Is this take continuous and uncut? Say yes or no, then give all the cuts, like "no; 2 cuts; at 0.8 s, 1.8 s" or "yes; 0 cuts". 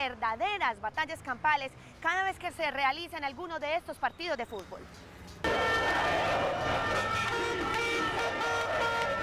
no; 1 cut; at 4.5 s